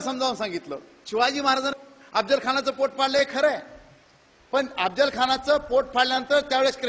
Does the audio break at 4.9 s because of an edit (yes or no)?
yes